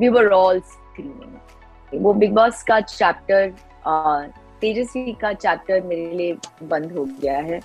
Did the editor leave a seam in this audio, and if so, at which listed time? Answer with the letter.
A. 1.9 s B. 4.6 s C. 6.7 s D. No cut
A